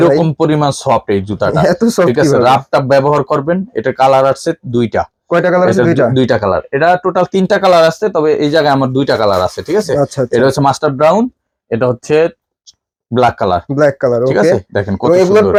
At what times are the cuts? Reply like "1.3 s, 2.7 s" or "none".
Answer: none

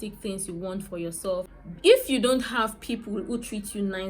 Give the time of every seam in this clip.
1.5 s

